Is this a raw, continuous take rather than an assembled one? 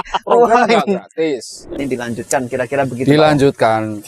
no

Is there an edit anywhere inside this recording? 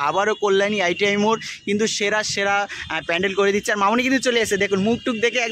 no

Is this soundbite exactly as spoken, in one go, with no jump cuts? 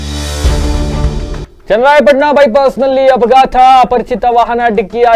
yes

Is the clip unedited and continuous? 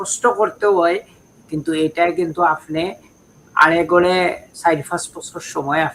yes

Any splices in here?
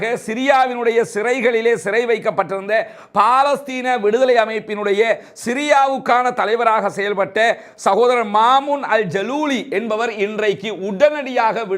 no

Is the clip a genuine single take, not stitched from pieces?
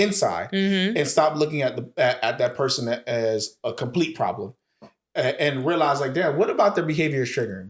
yes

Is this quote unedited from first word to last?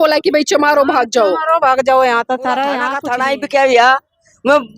no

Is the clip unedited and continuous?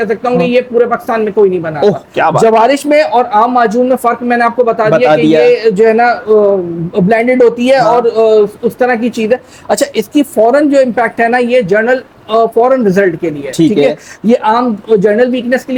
yes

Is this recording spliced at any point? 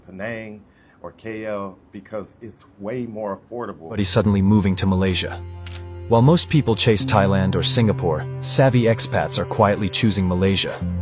yes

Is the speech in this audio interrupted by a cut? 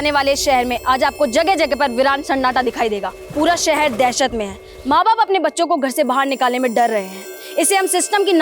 yes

